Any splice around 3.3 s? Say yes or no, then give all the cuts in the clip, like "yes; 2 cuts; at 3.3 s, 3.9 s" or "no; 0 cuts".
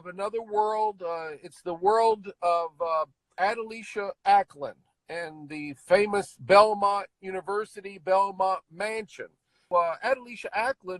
yes; 2 cuts; at 3.3 s, 9.7 s